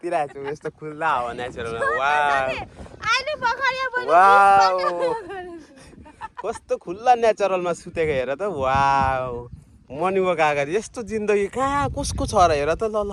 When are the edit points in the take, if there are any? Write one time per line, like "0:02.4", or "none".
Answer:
none